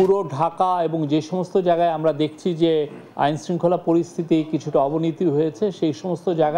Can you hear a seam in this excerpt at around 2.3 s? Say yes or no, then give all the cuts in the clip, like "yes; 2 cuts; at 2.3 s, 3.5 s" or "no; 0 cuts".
yes; 1 cut; at 2.3 s